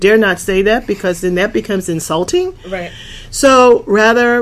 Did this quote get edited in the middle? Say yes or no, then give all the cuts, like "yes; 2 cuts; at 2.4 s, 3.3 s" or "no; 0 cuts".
no; 0 cuts